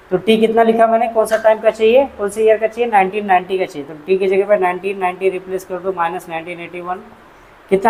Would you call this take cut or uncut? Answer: uncut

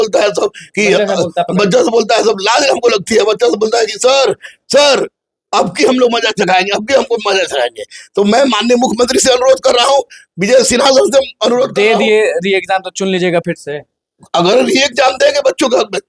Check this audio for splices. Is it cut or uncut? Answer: uncut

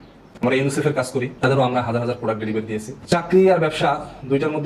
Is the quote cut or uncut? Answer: cut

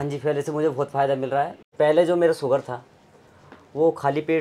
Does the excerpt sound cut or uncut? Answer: cut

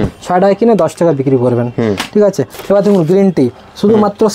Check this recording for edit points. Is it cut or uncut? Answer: cut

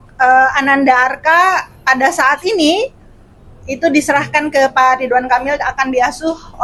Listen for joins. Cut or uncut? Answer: uncut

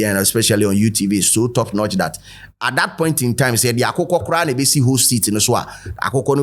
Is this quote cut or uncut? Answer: uncut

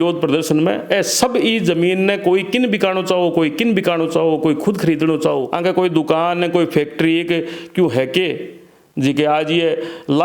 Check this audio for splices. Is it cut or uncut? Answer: cut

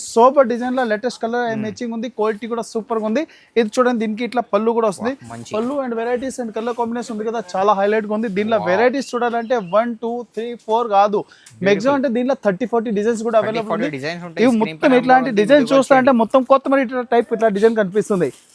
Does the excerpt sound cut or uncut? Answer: uncut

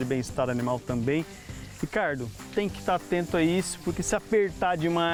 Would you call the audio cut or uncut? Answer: uncut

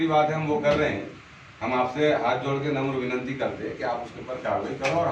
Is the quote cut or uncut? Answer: uncut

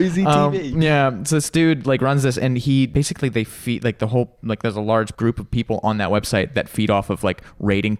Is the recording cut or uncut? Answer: cut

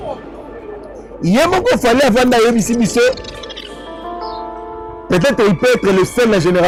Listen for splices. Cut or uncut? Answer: uncut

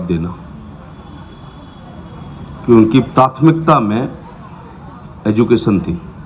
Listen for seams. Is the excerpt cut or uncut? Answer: uncut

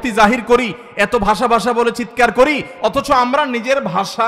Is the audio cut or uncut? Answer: uncut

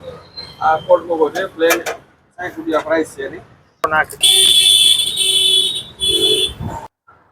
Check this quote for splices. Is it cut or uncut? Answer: cut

